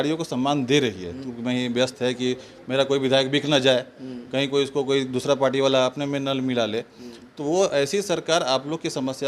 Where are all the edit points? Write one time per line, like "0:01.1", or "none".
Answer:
0:01.3